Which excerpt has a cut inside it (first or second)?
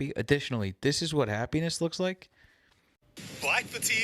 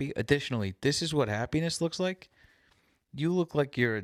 first